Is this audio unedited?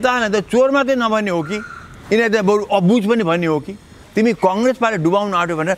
no; 1 cut; at 4.0 s

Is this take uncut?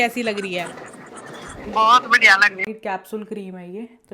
no; 1 cut; at 2.7 s

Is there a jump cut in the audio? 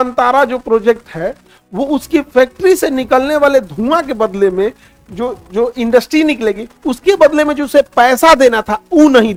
no; 0 cuts

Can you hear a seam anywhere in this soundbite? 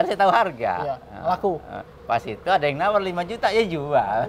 no; 0 cuts

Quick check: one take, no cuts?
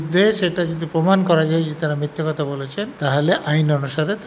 no; 1 cut; at 2.9 s

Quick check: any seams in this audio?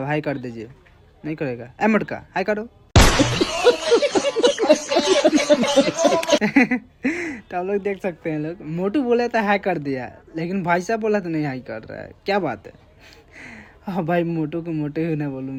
no; 0 cuts

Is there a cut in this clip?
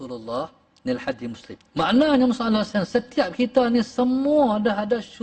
yes; 1 cut; at 1.5 s

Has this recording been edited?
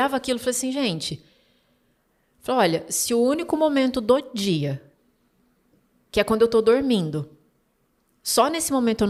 no; 0 cuts

